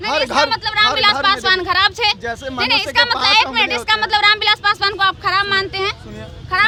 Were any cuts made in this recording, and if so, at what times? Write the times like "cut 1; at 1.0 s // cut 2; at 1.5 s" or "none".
none